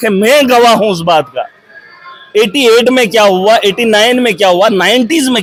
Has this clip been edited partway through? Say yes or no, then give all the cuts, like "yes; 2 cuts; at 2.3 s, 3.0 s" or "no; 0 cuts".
no; 0 cuts